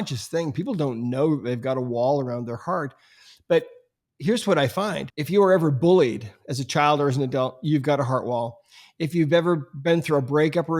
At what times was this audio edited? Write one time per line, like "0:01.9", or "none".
0:05.1